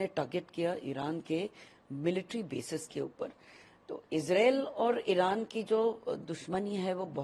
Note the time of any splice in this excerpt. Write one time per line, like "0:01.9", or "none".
none